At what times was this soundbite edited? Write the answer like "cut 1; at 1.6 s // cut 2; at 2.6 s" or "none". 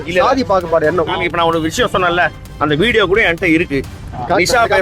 cut 1; at 1.1 s